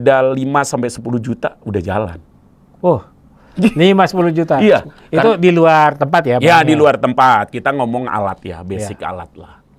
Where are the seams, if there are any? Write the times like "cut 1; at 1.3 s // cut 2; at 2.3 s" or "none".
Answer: none